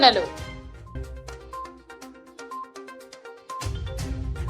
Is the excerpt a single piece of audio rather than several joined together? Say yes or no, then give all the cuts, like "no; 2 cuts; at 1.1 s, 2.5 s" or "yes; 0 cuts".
no; 1 cut; at 1.0 s